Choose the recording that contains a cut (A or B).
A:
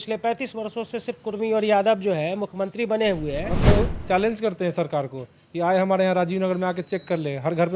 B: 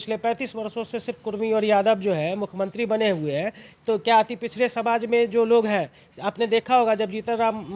A